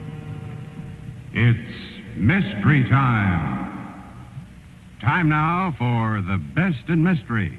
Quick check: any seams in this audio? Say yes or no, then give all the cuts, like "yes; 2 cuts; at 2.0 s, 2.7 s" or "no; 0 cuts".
no; 0 cuts